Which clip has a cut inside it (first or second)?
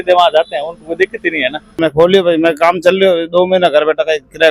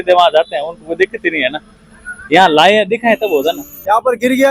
first